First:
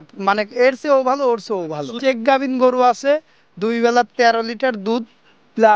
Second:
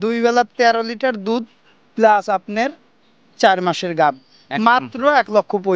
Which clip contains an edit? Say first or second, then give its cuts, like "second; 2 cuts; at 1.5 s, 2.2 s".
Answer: first; 1 cut; at 1.9 s